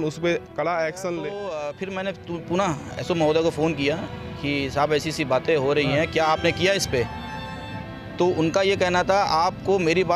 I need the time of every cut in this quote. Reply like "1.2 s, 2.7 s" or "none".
1.4 s